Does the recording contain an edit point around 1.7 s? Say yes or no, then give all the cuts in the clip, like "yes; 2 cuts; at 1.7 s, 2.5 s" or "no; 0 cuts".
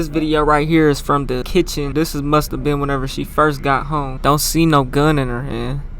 yes; 2 cuts; at 1.7 s, 4.1 s